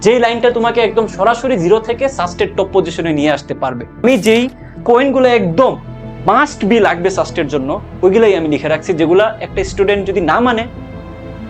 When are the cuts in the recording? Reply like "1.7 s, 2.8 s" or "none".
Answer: 4.0 s

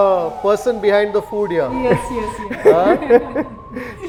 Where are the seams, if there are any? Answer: none

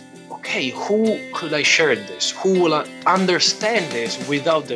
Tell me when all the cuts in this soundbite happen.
none

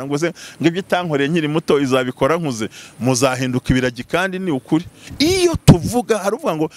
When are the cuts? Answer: 5.0 s

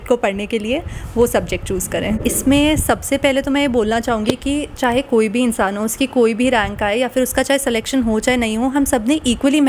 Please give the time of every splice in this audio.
2.2 s

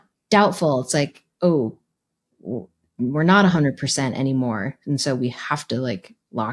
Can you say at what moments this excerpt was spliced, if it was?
none

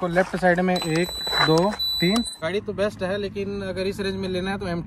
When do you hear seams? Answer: 2.4 s

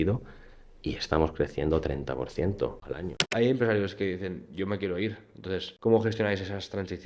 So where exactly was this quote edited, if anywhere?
3.3 s, 5.7 s

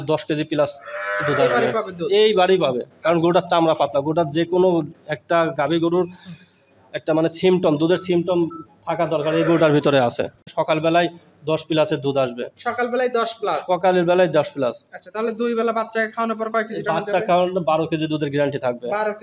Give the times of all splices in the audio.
10.4 s

